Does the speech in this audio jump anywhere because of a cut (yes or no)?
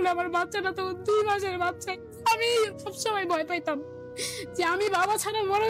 yes